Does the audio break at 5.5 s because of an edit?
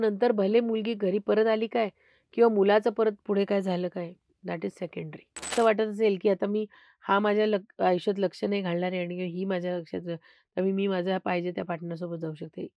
yes; 1 cut; at 5.5 s

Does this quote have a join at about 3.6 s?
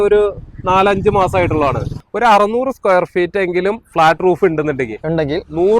no; 1 cut; at 1.9 s

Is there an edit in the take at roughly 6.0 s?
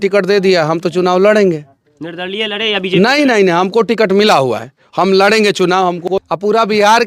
yes; 1 cut; at 6.0 s

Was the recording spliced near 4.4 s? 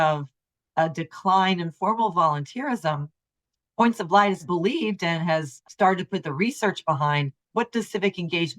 yes; 3 cuts; at 4.4 s, 5.6 s, 7.4 s

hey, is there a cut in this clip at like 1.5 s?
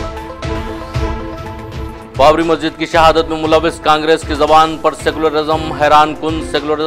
yes; 1 cut; at 1.5 s

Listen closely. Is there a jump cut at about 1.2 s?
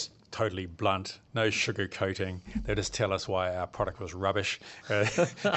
yes; 1 cut; at 1.2 s

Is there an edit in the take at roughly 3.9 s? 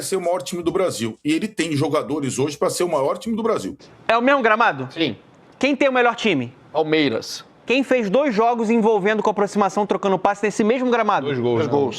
yes; 1 cut; at 3.9 s

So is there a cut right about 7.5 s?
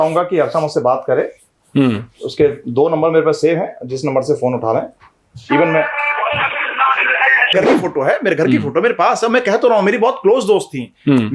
yes; 1 cut; at 7.5 s

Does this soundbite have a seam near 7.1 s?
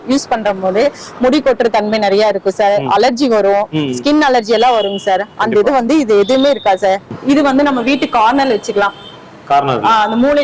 yes; 1 cut; at 7.1 s

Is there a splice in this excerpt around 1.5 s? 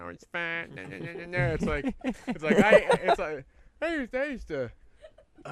no; 0 cuts

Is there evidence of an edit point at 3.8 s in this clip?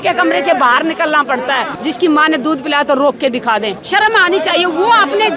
yes; 2 cuts; at 1.7 s, 3.8 s

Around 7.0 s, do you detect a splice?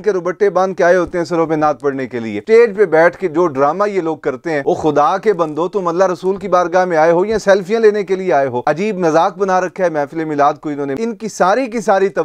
no; 4 cuts; at 2.4 s, 4.6 s, 8.6 s, 10.9 s

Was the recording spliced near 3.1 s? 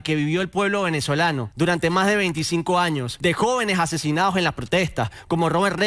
yes; 2 cuts; at 1.5 s, 3.1 s

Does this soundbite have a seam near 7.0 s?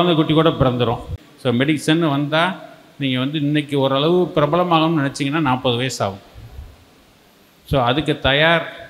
no; 1 cut; at 1.1 s

